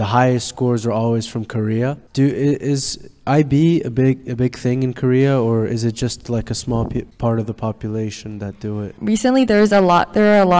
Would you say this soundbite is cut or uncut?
cut